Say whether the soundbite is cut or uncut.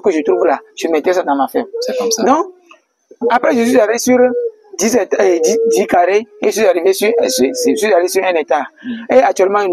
uncut